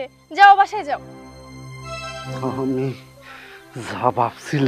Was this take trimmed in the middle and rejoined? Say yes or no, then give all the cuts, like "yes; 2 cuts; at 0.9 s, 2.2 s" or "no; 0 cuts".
yes; 1 cut; at 2.4 s